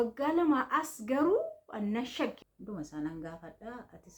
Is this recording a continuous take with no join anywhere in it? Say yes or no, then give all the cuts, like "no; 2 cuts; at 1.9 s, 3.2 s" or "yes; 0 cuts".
no; 1 cut; at 2.4 s